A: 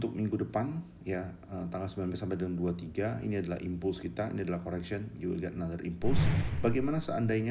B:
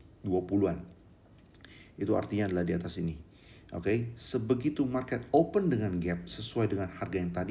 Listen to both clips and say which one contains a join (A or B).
A